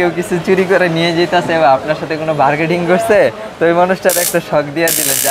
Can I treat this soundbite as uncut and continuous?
yes; 0 cuts

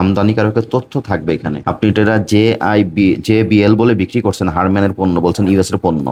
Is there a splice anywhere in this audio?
no; 0 cuts

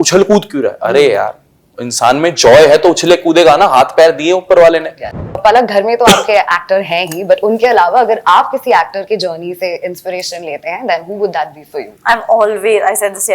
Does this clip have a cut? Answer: yes; 1 cut; at 5.4 s

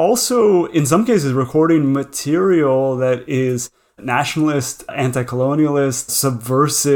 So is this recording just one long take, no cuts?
no; 2 cuts; at 4.9 s, 6.1 s

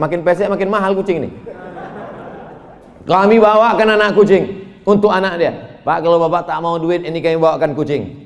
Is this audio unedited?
yes; 0 cuts

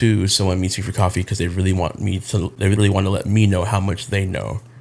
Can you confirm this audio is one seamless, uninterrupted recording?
no; 1 cut; at 2.8 s

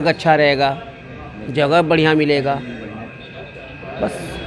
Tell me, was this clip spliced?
no; 0 cuts

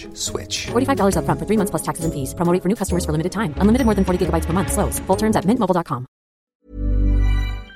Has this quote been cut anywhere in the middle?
yes; 1 cut; at 6.4 s

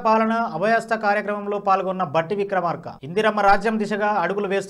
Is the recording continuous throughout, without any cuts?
yes; 0 cuts

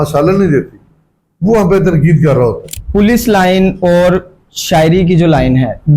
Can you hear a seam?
yes; 1 cut; at 2.7 s

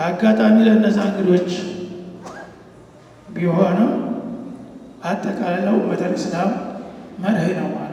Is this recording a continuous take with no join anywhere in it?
yes; 0 cuts

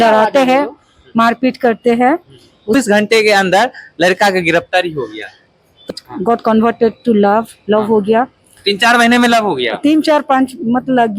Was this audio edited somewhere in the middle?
yes; 2 cuts; at 2.7 s, 5.9 s

